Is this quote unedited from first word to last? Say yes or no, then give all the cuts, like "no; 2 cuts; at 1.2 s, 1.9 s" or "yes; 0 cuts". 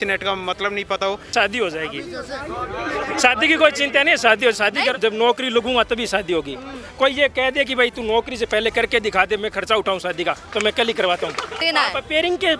no; 3 cuts; at 1.3 s, 5.0 s, 11.6 s